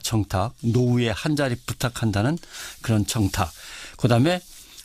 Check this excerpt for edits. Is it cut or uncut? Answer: uncut